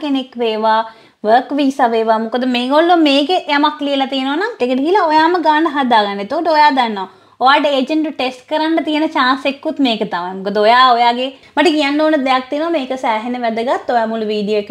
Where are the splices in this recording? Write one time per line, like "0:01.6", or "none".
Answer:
0:04.6
0:11.4